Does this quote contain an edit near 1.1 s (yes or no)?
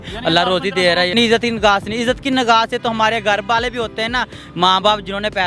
yes